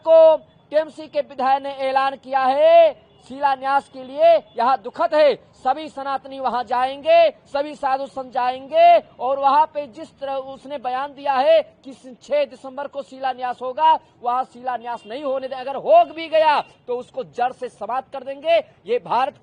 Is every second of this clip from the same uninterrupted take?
yes; 0 cuts

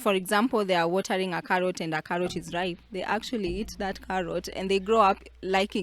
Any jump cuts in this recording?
no; 0 cuts

